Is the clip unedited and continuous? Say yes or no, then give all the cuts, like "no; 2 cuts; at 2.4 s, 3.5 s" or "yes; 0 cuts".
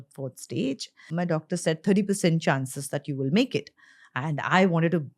no; 1 cut; at 1.0 s